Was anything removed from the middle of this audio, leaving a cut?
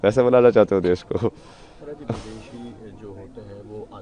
no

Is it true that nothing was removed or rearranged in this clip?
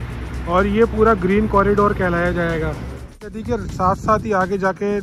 no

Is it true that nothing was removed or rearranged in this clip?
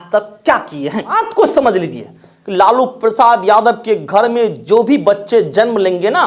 no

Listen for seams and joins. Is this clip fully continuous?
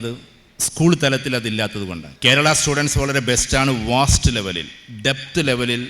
no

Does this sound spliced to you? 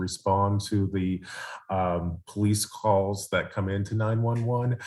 no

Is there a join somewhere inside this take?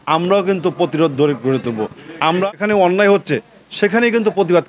yes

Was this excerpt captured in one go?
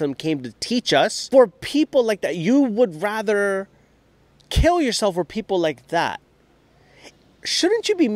no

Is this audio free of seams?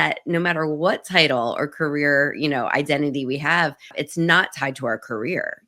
no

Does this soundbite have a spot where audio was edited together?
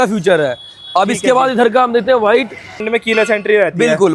yes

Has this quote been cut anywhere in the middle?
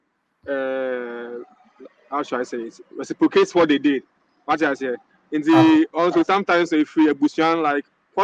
no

